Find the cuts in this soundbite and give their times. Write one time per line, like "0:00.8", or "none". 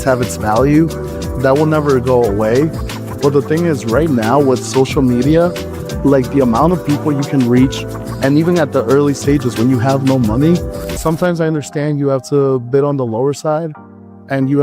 0:10.8